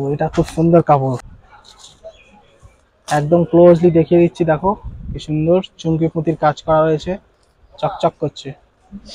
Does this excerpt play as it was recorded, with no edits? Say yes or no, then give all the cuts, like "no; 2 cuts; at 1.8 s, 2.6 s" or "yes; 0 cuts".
no; 1 cut; at 1.3 s